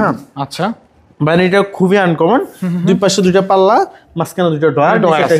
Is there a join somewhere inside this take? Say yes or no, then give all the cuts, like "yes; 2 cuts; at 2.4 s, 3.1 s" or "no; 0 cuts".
no; 0 cuts